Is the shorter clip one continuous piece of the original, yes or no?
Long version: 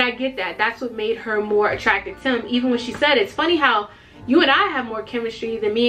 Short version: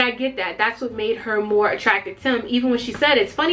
yes